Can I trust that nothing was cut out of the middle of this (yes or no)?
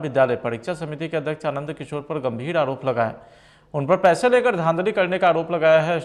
yes